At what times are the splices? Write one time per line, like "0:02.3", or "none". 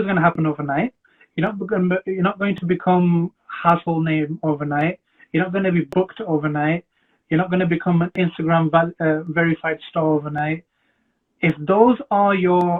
none